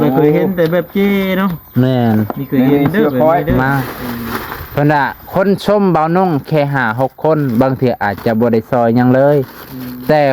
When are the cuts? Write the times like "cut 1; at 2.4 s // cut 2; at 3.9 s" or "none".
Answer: cut 1; at 3.5 s